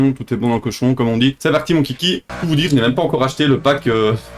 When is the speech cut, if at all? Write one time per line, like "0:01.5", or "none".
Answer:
0:01.4
0:02.3